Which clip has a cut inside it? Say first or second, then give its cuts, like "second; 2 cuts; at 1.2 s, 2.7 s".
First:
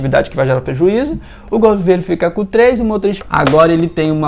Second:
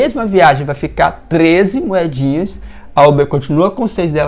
first; 1 cut; at 3.2 s